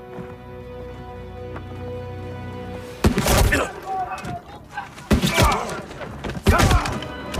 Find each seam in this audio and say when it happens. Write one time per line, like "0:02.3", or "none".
none